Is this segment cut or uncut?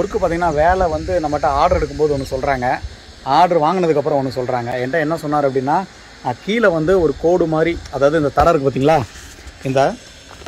uncut